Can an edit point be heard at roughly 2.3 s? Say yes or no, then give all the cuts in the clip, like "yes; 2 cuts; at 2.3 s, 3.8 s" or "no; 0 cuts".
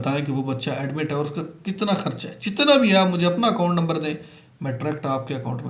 no; 0 cuts